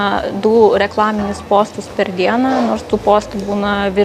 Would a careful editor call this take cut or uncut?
uncut